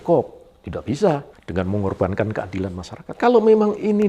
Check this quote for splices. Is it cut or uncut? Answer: cut